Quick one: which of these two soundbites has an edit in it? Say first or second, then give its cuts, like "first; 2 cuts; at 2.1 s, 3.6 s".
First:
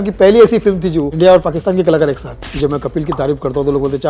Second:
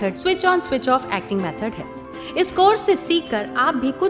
first; 2 cuts; at 1.1 s, 2.4 s